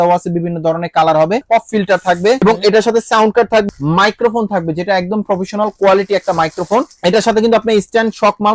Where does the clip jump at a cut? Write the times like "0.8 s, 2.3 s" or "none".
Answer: 1.4 s, 2.4 s, 3.7 s, 6.9 s